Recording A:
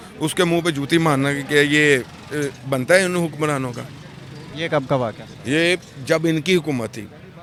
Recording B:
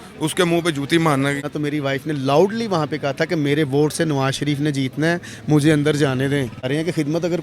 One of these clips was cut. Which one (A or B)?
B